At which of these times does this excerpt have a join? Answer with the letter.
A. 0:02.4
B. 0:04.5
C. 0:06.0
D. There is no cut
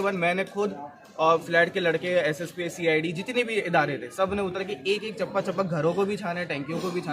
D